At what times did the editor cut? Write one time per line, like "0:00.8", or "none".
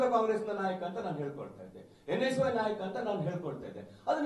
none